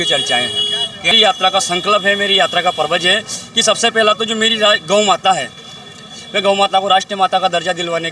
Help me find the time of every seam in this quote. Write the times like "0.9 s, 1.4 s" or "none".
1.1 s